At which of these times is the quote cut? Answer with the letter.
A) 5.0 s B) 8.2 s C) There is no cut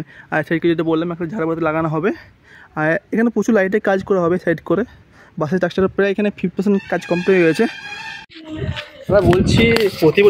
B